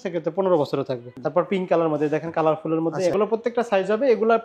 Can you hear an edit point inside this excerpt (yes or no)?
yes